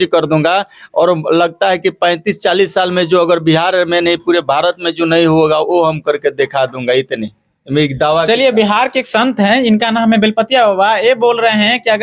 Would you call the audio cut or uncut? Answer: uncut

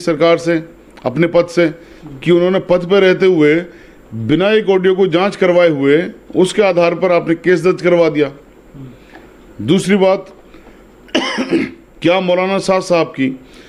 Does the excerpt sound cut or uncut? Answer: uncut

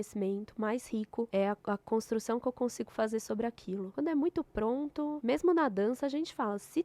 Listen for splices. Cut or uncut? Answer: cut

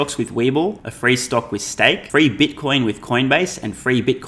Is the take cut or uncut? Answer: cut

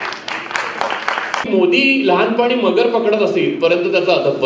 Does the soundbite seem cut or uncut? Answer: cut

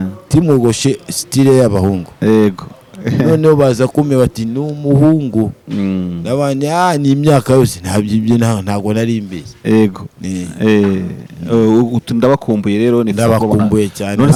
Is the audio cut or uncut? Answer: uncut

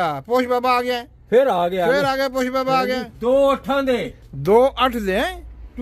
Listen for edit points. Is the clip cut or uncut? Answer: cut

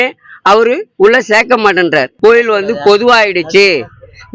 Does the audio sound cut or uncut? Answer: cut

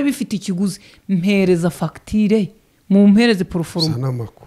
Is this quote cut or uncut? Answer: uncut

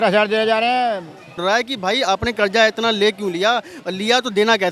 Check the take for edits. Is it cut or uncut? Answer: cut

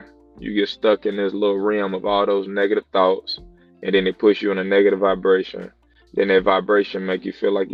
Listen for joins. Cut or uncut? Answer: uncut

